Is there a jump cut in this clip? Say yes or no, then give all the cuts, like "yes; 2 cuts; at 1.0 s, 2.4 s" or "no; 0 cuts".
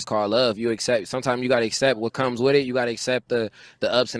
no; 0 cuts